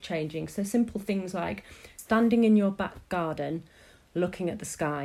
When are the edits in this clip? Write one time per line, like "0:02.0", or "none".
0:01.9